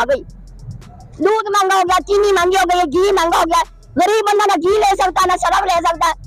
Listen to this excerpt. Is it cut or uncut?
uncut